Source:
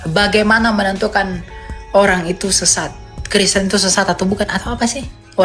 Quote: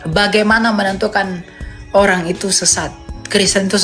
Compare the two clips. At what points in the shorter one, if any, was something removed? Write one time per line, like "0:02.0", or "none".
none

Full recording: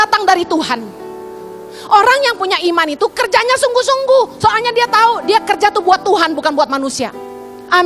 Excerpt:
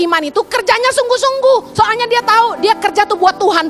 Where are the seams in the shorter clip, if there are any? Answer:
none

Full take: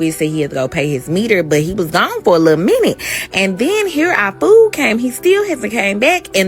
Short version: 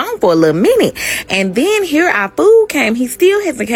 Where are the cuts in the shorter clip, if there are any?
none

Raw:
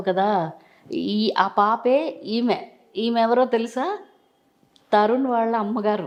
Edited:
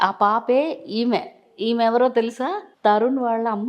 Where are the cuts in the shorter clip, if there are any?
0:02.7

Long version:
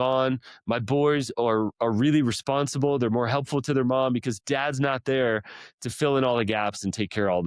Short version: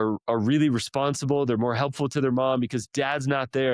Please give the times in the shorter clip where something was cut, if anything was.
none

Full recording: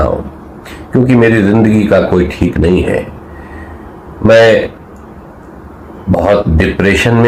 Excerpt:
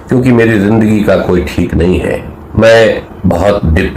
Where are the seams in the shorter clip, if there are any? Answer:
0:02.3
0:03.1

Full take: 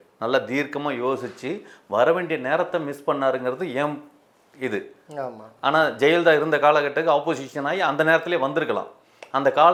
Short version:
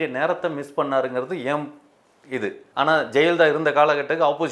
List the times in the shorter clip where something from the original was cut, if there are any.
0:02.6

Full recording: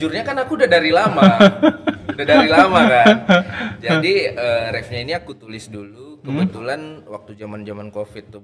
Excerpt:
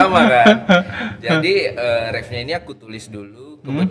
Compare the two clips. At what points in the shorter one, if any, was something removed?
none

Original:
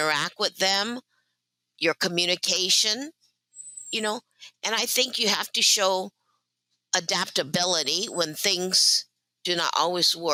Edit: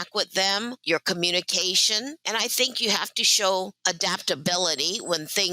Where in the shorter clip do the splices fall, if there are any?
0:00.8
0:02.2
0:03.8

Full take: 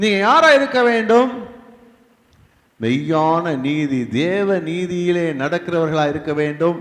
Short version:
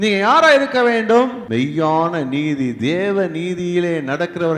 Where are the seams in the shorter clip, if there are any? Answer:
0:01.4

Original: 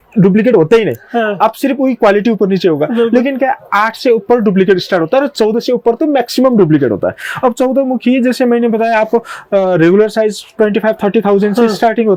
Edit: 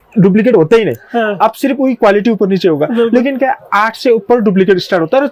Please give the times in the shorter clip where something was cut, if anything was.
none

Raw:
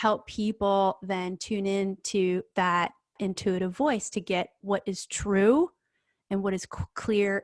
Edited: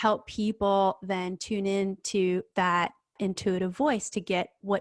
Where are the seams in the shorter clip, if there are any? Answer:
none

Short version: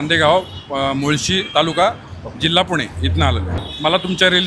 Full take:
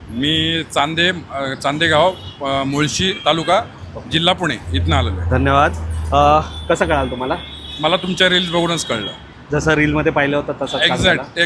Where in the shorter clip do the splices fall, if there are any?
0:03.5

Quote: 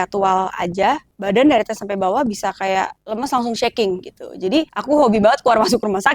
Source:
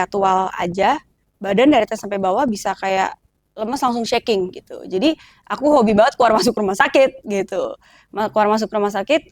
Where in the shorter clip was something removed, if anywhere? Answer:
0:01.1
0:03.0
0:04.8

